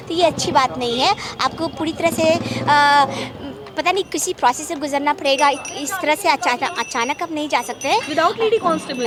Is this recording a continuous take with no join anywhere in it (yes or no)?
yes